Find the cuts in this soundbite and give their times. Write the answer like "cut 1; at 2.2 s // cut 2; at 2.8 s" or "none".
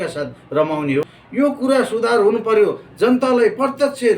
cut 1; at 1.2 s